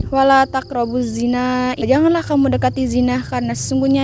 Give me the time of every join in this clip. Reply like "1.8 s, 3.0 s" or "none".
1.8 s